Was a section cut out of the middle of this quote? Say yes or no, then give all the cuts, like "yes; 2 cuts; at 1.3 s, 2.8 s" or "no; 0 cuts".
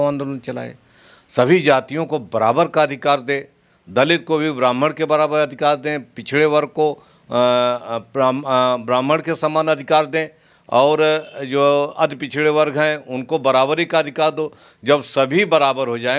no; 0 cuts